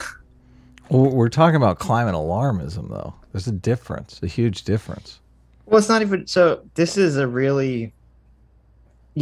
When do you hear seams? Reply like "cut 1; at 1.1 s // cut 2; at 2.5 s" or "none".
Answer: none